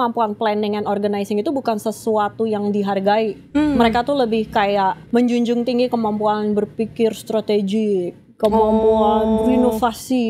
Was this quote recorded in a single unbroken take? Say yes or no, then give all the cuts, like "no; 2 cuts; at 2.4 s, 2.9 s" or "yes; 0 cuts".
no; 2 cuts; at 3.4 s, 5.0 s